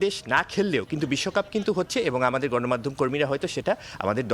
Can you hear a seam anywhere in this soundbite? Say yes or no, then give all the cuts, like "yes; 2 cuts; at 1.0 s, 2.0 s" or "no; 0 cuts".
no; 0 cuts